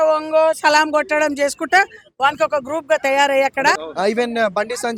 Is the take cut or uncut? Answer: cut